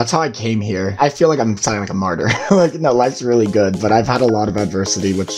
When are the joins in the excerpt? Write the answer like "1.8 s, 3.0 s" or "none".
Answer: 0.9 s